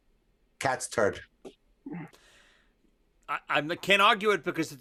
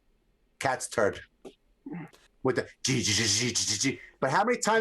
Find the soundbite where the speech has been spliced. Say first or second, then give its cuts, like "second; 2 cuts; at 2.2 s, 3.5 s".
second; 1 cut; at 2.3 s